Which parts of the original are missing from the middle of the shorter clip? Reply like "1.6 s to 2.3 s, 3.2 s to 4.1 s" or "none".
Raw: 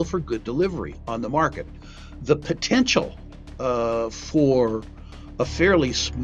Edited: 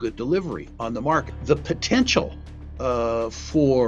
1.6 s to 2.1 s